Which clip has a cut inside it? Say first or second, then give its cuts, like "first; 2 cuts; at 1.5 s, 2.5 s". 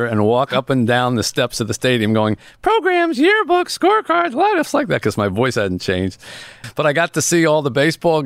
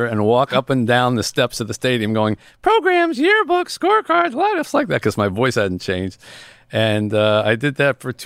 first; 1 cut; at 6.5 s